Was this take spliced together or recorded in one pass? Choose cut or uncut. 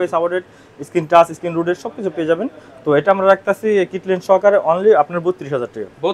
uncut